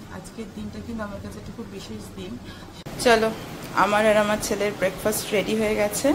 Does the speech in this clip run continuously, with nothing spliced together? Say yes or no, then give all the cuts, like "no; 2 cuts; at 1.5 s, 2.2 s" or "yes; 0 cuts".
no; 1 cut; at 2.8 s